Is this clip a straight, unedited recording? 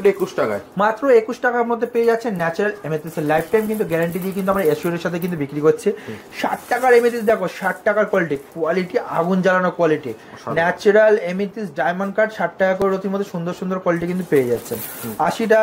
yes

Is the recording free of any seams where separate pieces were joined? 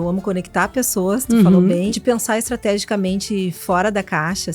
no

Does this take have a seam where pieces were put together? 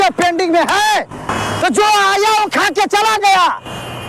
yes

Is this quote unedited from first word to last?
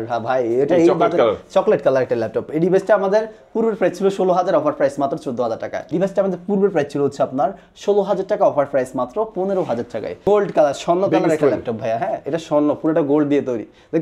no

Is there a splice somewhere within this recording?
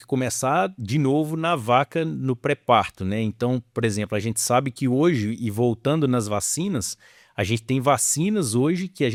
no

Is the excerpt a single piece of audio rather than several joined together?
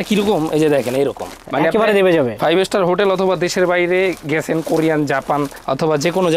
yes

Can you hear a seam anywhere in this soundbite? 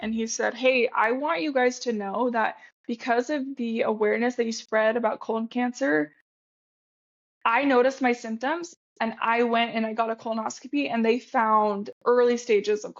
no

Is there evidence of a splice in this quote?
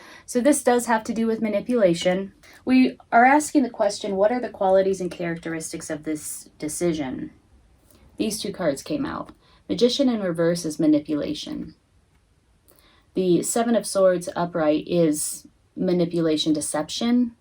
yes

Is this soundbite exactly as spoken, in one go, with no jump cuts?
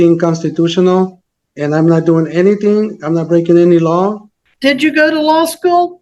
no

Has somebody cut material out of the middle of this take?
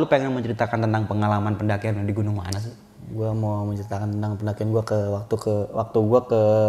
no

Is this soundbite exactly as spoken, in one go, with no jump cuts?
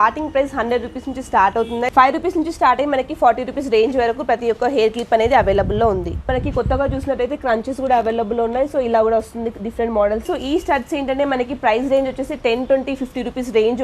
no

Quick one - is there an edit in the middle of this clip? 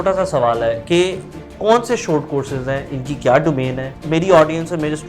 yes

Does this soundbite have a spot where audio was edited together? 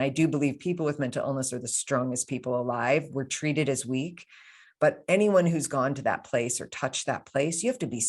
no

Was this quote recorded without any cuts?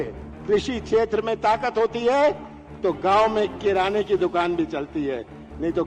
yes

